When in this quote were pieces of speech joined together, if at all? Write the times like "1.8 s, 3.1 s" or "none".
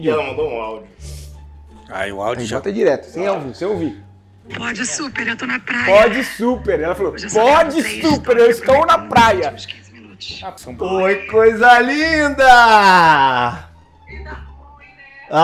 none